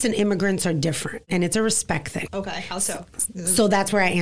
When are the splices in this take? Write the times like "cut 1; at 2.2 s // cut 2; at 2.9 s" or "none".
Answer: cut 1; at 1.2 s // cut 2; at 2.3 s